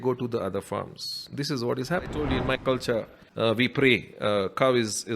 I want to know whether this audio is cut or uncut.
cut